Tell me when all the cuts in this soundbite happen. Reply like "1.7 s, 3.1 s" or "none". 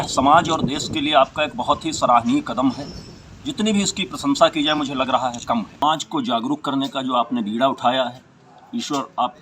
4.8 s, 5.8 s